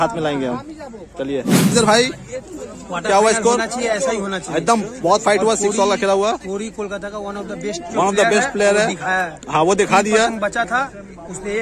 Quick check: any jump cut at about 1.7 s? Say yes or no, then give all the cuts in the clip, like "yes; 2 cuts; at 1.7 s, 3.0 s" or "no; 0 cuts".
yes; 1 cut; at 1.7 s